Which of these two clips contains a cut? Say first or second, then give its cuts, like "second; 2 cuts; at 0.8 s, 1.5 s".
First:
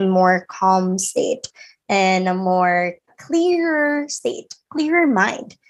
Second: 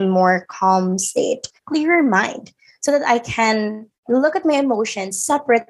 second; 1 cut; at 1.5 s